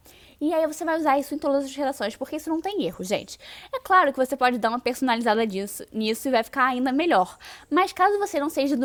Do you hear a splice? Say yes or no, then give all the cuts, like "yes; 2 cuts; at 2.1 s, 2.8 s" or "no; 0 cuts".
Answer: no; 0 cuts